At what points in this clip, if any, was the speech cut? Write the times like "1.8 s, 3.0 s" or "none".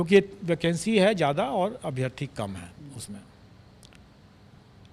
none